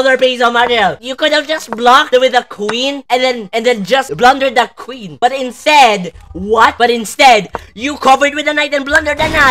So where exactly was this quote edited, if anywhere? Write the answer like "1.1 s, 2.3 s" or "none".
none